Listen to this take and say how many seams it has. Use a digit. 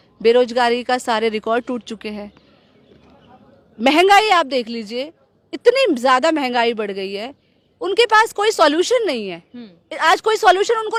0